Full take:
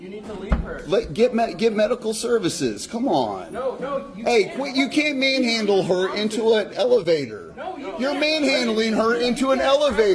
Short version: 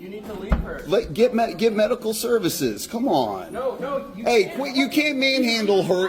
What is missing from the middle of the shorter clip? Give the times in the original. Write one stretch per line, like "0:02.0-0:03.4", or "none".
none